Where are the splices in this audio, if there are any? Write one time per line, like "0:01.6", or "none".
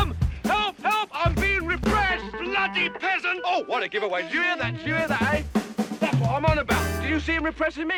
none